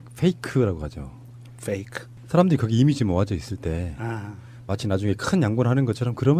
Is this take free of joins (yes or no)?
yes